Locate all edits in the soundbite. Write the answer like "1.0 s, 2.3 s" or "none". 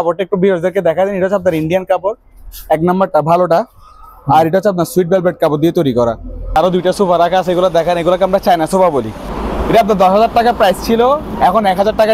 6.6 s, 9.3 s